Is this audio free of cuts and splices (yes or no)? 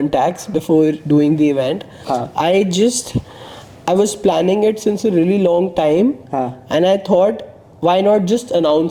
yes